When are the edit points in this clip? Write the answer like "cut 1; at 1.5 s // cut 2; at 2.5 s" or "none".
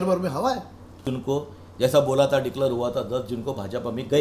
cut 1; at 1.1 s

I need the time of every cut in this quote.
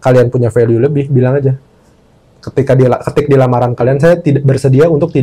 none

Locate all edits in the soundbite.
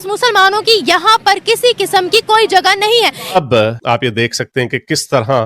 cut 1; at 3.4 s

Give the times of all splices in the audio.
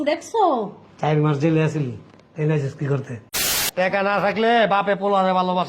cut 1; at 3.6 s

